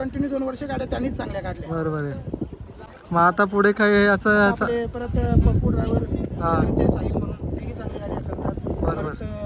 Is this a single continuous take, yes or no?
yes